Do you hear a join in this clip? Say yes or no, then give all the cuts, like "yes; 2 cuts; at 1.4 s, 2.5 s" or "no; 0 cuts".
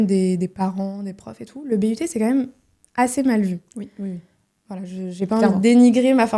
no; 0 cuts